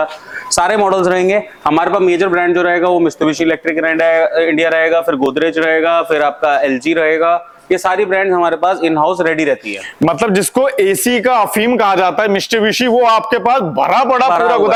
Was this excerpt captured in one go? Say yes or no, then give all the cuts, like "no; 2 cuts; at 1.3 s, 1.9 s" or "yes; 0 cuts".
yes; 0 cuts